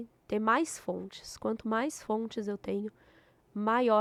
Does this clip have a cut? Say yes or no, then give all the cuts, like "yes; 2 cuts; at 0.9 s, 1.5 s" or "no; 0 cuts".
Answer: no; 0 cuts